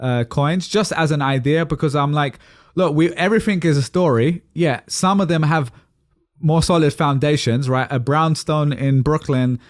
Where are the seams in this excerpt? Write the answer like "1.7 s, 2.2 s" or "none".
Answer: none